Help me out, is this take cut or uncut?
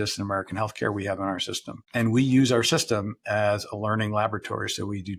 uncut